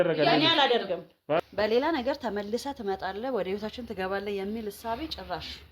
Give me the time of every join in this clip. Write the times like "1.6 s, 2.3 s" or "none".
1.4 s